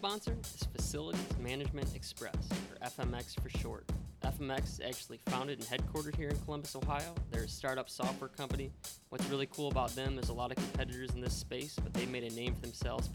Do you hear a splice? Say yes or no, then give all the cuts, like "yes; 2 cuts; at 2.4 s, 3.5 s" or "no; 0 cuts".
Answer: no; 0 cuts